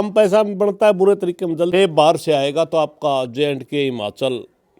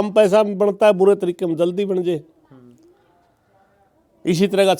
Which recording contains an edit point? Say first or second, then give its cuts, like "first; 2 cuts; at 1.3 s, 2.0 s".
first; 1 cut; at 1.7 s